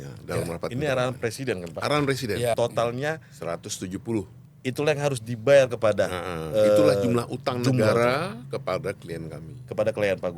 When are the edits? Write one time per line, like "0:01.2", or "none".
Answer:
0:02.6